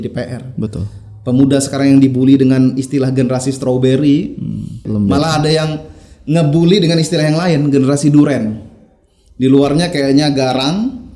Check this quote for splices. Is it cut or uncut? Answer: cut